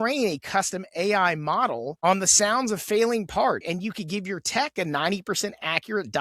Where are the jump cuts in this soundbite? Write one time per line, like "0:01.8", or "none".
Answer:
0:03.7